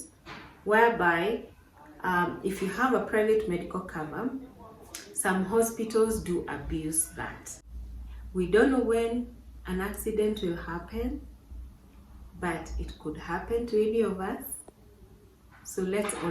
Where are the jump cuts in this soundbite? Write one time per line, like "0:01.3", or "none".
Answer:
0:07.4

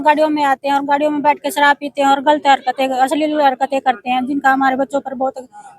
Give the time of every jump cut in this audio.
none

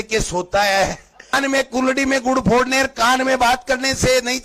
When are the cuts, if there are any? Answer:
0:01.3

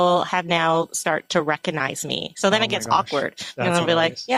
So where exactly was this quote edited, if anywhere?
none

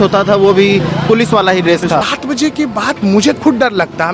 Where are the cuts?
0:02.1

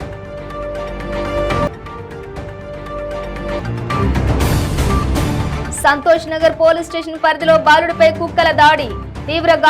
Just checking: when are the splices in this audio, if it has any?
none

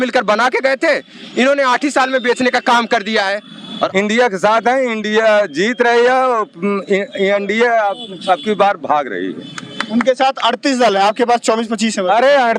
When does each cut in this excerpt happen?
0:03.9

